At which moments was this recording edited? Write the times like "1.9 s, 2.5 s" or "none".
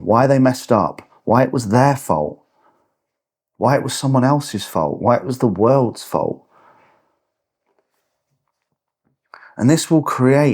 none